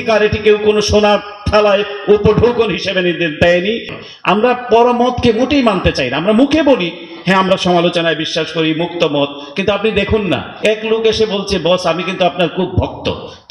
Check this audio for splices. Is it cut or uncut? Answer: cut